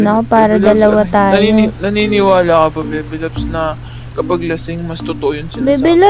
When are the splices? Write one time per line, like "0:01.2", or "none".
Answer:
none